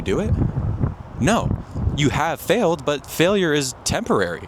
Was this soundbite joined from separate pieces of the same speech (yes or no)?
no